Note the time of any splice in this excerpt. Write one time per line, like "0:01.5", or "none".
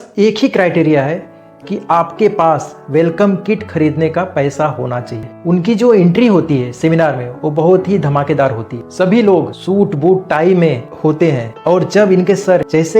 0:05.3